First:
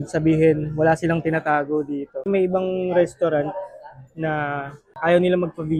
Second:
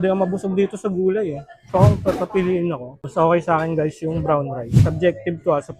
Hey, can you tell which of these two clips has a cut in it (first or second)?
second